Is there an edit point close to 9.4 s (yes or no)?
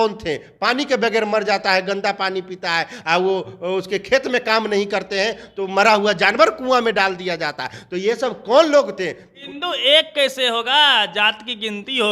yes